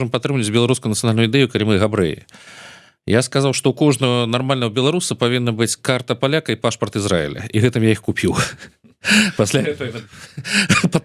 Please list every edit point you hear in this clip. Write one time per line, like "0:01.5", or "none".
none